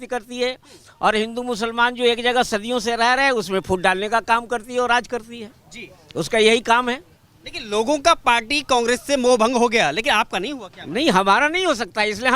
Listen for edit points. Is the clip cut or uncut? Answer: uncut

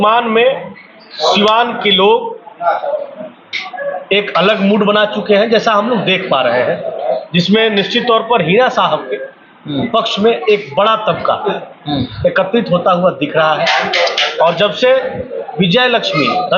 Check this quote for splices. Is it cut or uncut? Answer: uncut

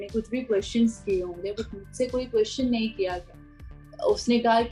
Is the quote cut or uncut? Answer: uncut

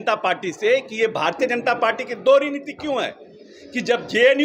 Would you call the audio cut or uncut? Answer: uncut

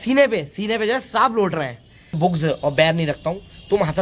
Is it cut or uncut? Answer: cut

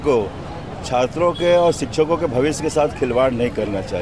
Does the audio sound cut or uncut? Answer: uncut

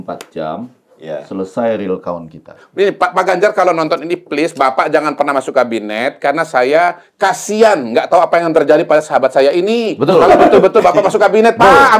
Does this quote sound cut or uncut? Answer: cut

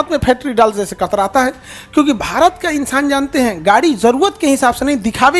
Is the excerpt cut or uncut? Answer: uncut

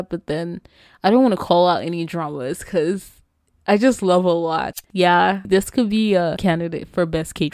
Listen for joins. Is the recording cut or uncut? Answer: cut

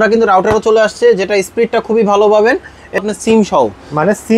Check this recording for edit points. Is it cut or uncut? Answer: cut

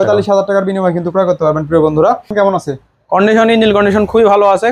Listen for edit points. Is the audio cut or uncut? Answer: cut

